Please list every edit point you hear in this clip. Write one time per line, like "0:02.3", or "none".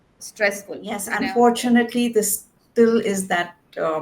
0:01.1